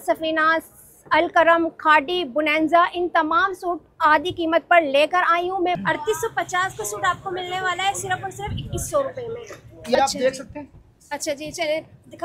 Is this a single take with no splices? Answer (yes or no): no